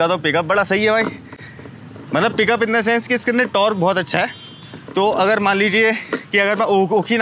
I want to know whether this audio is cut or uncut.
uncut